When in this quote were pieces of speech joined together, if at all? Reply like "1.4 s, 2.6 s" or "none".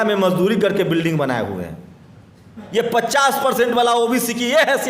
2.6 s